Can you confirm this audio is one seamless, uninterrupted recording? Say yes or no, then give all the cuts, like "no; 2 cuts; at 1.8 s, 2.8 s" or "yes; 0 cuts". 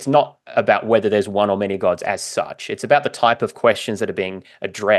yes; 0 cuts